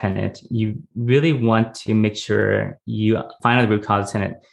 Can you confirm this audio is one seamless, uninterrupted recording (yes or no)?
no